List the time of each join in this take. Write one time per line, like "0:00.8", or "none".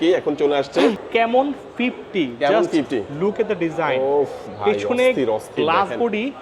0:01.0